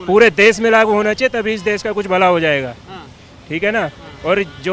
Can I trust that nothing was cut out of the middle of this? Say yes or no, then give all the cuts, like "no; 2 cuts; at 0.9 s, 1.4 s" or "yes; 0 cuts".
yes; 0 cuts